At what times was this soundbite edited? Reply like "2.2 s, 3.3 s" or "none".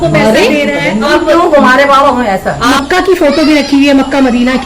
1.1 s, 2.7 s